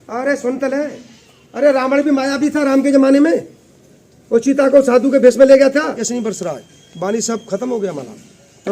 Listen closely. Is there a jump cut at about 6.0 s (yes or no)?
yes